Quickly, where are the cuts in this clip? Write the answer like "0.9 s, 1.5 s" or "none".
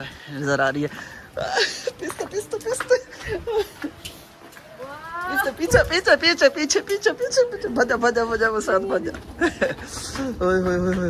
none